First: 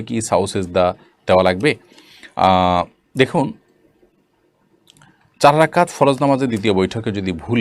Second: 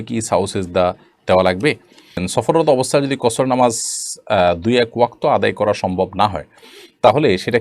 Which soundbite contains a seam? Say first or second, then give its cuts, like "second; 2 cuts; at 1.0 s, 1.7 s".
second; 1 cut; at 2.2 s